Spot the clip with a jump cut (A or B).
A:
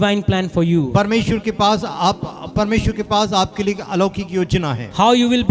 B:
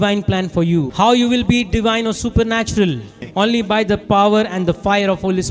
B